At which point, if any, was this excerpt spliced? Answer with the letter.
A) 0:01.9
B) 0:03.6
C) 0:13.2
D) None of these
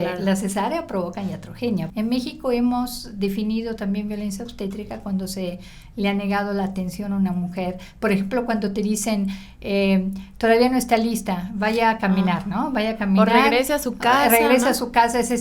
A